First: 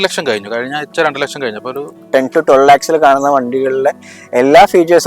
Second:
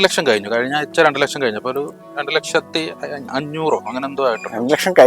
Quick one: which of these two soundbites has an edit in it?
first; 1 cut; at 2.0 s

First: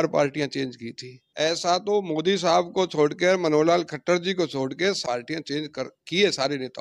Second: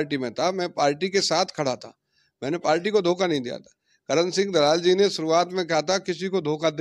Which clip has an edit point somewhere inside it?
first; 2 cuts; at 1.2 s, 5.0 s

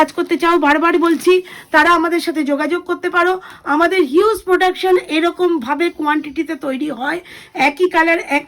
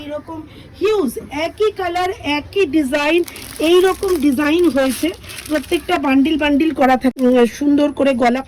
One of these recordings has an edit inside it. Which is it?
second; 1 cut; at 7.1 s

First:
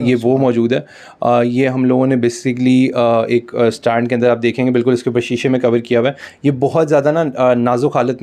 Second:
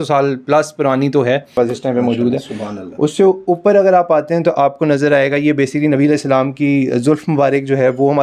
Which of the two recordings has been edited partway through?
second; 1 cut; at 1.5 s

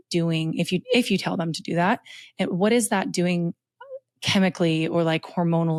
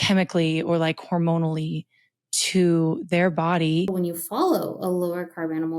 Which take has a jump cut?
second; 1 cut; at 3.9 s

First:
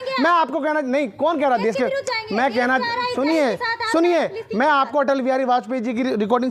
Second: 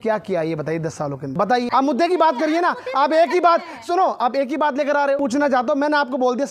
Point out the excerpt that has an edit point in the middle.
second; 2 cuts; at 1.5 s, 5.2 s

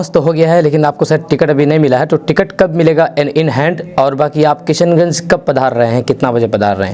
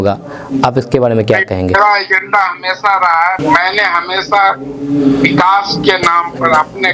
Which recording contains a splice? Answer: second; 1 cut; at 3.4 s

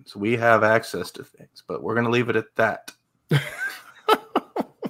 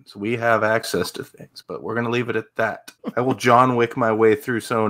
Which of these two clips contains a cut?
second; 1 cut; at 2.9 s

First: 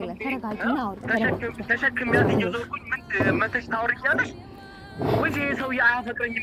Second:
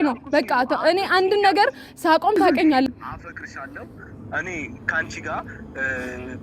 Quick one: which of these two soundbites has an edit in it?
second; 1 cut; at 2.9 s

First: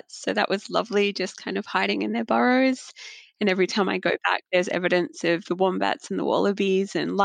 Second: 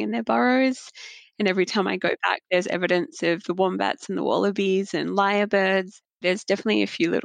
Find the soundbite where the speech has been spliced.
second; 1 cut; at 6.2 s

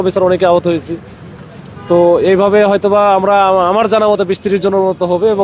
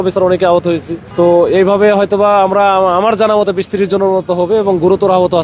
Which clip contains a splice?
second; 1 cut; at 1.0 s

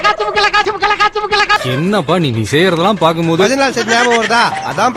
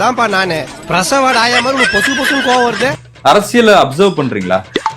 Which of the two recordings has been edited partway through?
second; 1 cut; at 3.1 s

